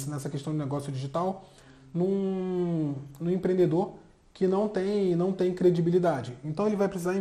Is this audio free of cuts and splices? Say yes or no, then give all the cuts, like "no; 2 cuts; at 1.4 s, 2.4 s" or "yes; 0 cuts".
yes; 0 cuts